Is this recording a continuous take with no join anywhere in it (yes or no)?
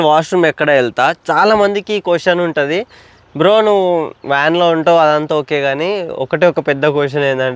yes